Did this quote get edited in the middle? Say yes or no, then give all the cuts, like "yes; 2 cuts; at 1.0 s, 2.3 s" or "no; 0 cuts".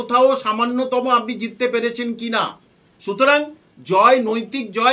no; 0 cuts